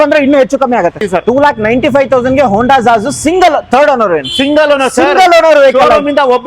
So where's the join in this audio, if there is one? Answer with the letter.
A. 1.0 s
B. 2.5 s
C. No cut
A